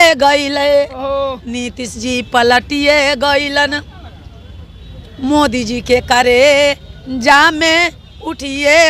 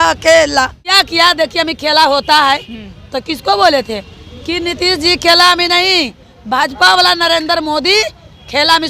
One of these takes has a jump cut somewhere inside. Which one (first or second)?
second